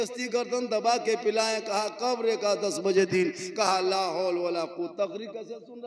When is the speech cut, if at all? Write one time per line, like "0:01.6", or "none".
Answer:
none